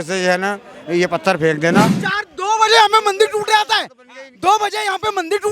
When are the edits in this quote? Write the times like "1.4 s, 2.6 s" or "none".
2.0 s